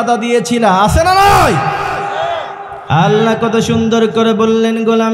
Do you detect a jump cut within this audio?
yes; 1 cut; at 2.7 s

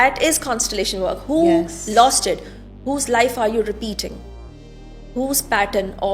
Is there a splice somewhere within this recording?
no; 0 cuts

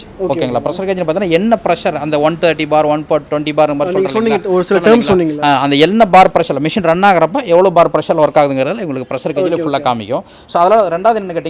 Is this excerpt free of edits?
yes; 0 cuts

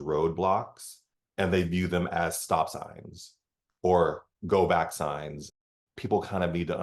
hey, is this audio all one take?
yes; 0 cuts

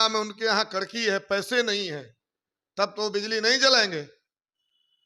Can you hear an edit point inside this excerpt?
no; 0 cuts

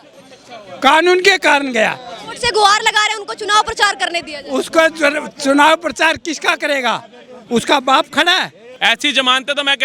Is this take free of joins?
no; 1 cut; at 8.6 s

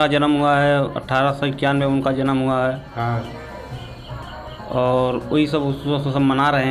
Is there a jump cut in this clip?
no; 0 cuts

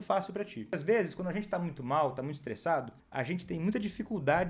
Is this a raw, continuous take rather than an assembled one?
no; 2 cuts; at 0.7 s, 3.0 s

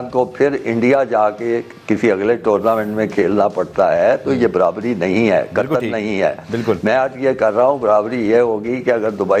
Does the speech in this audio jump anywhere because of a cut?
no; 0 cuts

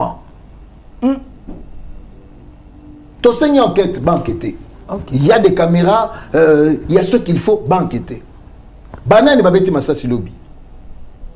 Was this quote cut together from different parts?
no; 0 cuts

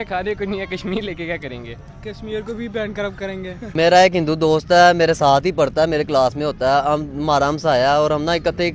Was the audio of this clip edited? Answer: yes; 1 cut; at 3.7 s

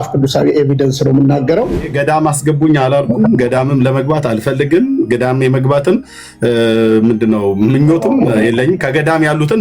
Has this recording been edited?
yes; 1 cut; at 1.9 s

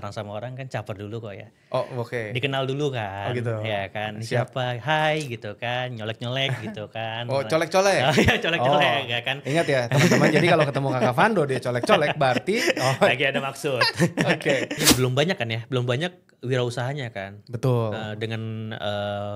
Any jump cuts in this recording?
yes; 1 cut; at 14.9 s

